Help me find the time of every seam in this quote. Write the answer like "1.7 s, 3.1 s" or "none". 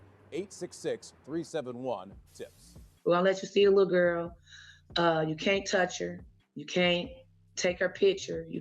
2.7 s